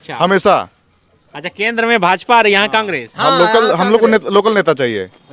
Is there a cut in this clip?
no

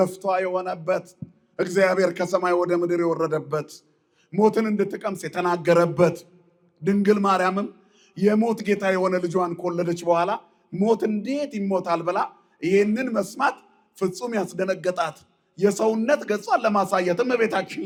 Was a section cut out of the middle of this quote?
no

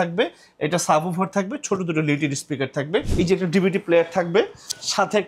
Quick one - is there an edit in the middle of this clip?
yes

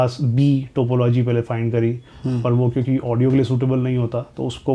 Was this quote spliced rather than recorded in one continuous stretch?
no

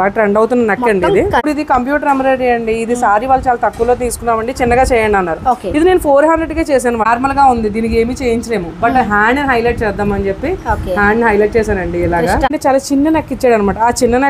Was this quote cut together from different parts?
yes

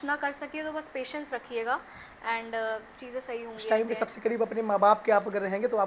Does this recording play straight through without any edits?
yes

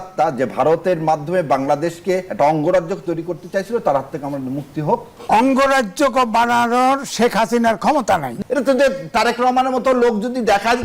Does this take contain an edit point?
yes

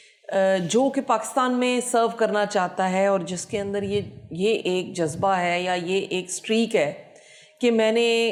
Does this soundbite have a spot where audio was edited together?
no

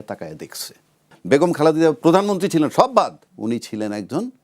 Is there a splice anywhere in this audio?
yes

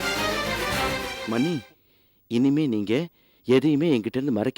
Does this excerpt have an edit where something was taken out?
yes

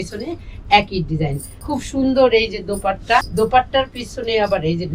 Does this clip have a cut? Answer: yes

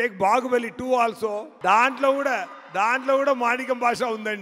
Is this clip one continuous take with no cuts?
no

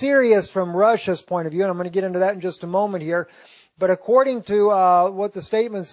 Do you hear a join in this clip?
yes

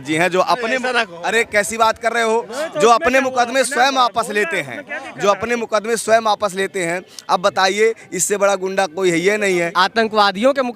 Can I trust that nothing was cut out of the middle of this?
no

